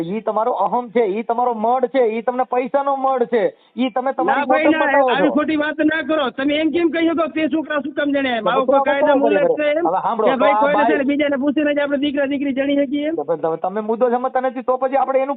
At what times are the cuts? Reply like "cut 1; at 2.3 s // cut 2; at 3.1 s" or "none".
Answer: none